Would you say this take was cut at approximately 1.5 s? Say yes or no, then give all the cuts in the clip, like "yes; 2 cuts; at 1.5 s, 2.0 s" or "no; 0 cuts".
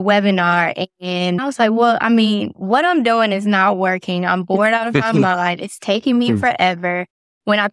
yes; 1 cut; at 1.5 s